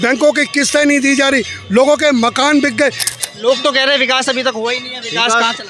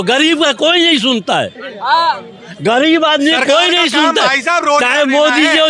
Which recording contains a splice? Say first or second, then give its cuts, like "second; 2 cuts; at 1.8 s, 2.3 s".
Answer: first; 1 cut; at 3.1 s